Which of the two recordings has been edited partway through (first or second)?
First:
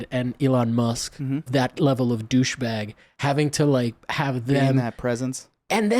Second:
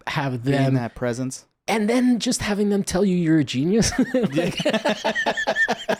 first